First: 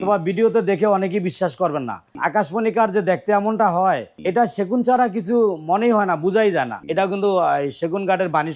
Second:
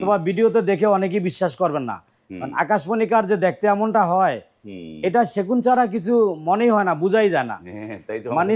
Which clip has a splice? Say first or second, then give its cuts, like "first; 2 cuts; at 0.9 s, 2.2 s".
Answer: first; 3 cuts; at 2.0 s, 4.1 s, 6.8 s